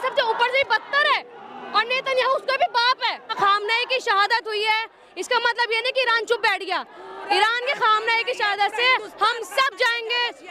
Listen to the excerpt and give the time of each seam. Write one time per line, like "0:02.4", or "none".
0:03.3